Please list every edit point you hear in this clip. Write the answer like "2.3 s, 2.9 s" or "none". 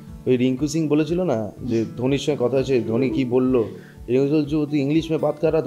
none

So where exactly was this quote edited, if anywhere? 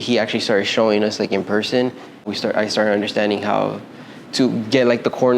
2.3 s

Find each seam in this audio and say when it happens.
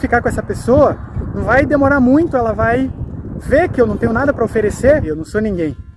5.0 s

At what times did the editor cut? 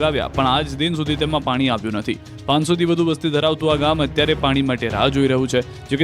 2.0 s

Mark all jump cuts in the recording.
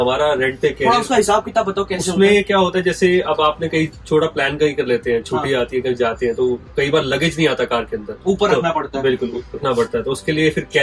none

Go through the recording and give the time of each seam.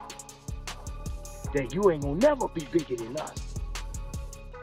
none

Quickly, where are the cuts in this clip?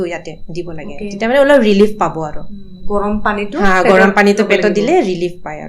none

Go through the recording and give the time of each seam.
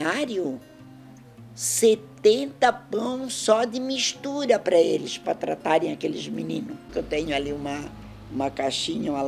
6.8 s

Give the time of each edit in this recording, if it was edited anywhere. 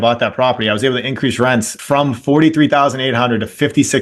1.8 s

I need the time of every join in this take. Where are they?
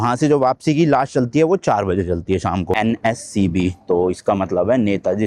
2.8 s

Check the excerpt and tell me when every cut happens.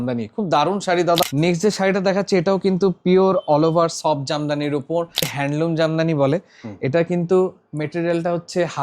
1.2 s, 5.3 s

